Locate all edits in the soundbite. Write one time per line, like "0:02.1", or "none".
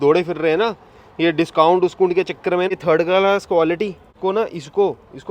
0:02.7
0:04.0